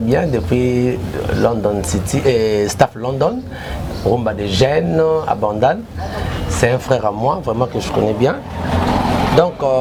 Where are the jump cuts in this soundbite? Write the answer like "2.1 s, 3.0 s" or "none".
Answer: none